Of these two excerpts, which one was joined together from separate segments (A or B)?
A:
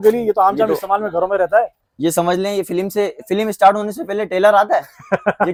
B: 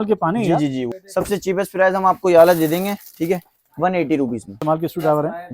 B